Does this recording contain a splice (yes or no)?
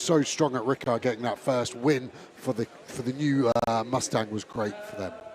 yes